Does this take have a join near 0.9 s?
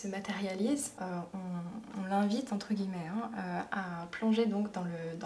yes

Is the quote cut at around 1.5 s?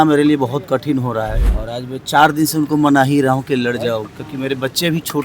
yes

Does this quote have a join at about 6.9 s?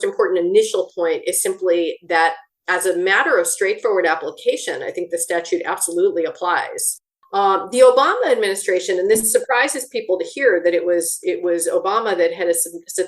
yes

